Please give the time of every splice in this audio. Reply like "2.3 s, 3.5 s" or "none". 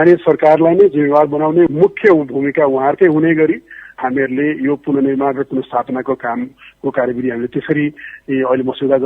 none